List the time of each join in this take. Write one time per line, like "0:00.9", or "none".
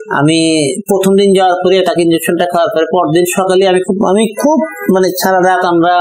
none